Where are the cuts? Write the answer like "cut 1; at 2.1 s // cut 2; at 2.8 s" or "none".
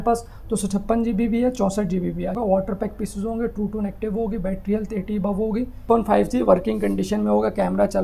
cut 1; at 2.4 s // cut 2; at 5.9 s